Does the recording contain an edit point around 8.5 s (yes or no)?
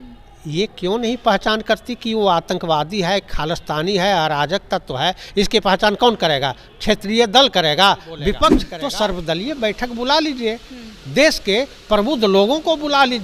yes